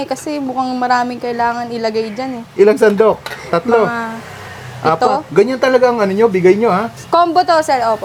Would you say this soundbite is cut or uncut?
uncut